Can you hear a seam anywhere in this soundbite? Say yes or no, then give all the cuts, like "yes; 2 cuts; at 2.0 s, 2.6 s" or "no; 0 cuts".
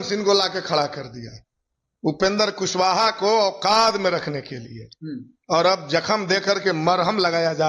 no; 0 cuts